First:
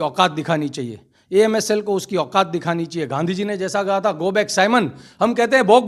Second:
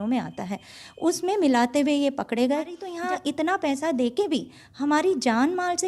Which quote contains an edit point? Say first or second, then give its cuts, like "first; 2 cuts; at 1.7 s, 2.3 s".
second; 1 cut; at 2.9 s